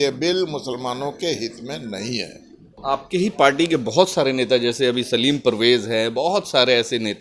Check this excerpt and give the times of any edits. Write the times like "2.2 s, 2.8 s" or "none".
2.8 s